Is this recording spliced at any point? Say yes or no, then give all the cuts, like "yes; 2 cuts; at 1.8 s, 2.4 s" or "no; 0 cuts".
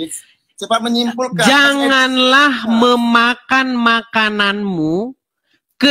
no; 0 cuts